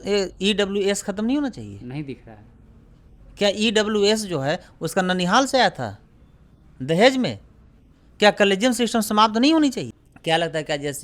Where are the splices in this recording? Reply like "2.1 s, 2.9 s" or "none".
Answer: 10.0 s